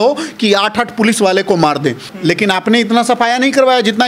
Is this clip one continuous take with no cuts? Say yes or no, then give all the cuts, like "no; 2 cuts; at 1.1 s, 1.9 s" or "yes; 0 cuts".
no; 1 cut; at 2.1 s